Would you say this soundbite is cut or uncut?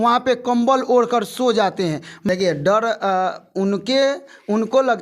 cut